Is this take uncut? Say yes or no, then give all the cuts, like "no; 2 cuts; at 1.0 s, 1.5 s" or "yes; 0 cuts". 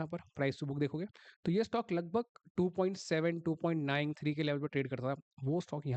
yes; 0 cuts